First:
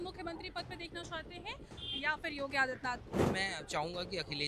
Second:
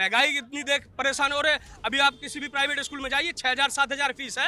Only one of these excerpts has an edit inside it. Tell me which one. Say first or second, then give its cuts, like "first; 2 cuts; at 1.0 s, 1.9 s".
first; 1 cut; at 3.2 s